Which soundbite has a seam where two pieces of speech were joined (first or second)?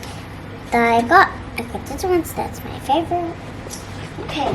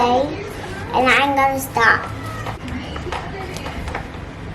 second